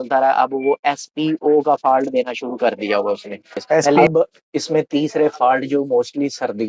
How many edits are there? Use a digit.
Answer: 1